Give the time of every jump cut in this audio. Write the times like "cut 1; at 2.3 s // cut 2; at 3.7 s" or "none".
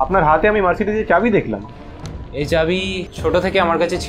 cut 1; at 3.1 s